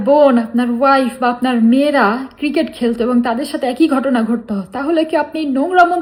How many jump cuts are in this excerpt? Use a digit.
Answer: 0